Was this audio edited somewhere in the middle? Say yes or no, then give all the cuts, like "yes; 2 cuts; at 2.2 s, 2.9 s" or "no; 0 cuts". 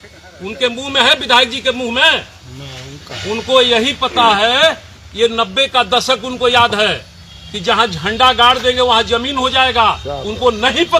no; 0 cuts